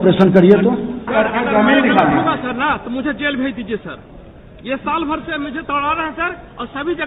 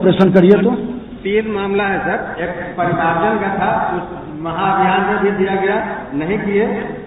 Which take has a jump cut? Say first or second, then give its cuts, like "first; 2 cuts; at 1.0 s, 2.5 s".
first; 1 cut; at 1.1 s